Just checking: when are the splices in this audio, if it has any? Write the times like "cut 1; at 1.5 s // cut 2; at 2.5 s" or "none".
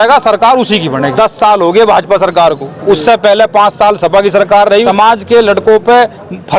cut 1; at 1.1 s // cut 2; at 4.9 s